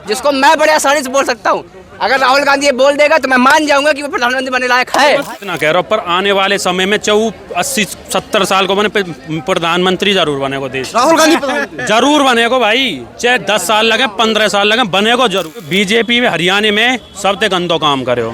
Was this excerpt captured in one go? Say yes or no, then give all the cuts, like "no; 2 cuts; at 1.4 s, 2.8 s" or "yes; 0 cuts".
no; 2 cuts; at 5.3 s, 15.8 s